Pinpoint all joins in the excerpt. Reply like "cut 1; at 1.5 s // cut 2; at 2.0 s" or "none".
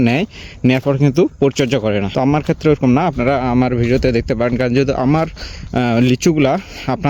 cut 1; at 2.1 s